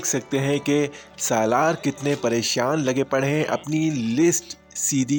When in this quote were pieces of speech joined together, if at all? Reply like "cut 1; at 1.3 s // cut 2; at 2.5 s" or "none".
none